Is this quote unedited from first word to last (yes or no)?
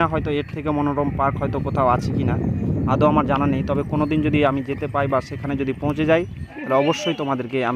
yes